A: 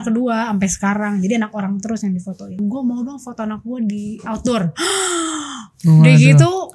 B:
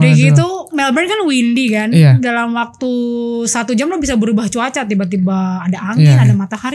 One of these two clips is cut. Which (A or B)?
A